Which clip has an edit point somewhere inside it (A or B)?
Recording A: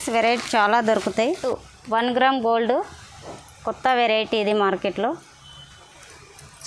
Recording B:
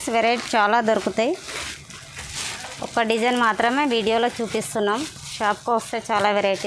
A